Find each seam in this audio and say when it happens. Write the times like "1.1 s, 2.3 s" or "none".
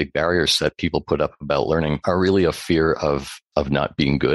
2.0 s, 3.4 s

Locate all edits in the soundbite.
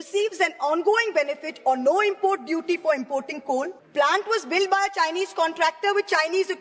3.8 s

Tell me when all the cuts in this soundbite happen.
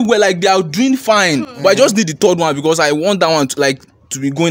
none

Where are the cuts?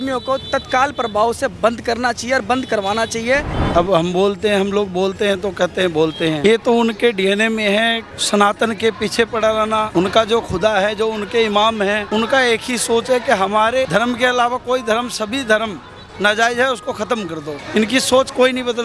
3.5 s, 6.4 s, 8.0 s, 9.9 s, 12.0 s, 13.9 s, 17.5 s

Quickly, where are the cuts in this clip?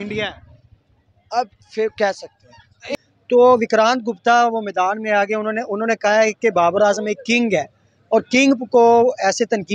2.9 s

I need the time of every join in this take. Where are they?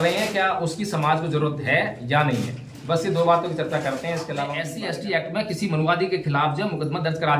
4.7 s

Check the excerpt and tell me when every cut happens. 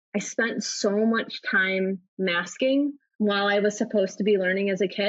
3.0 s

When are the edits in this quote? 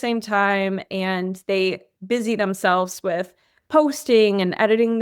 none

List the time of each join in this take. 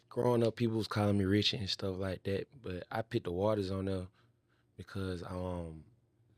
none

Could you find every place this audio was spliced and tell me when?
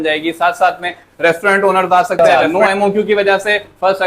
2.2 s

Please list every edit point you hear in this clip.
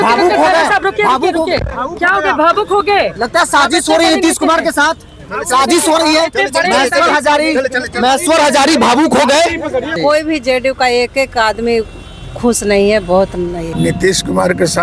9.9 s, 13.7 s

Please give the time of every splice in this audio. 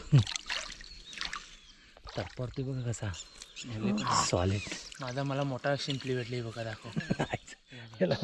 none

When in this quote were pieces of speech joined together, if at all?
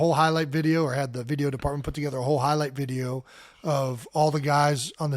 none

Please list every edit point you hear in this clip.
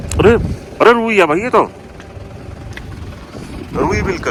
none

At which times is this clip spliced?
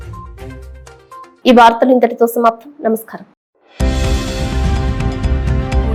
none

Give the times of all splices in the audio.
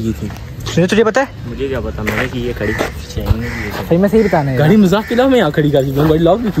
none

